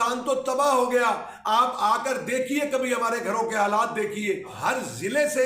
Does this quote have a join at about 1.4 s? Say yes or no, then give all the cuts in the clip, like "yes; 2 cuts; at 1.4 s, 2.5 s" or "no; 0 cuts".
no; 1 cut; at 4.5 s